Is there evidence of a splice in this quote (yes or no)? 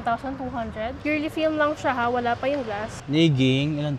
yes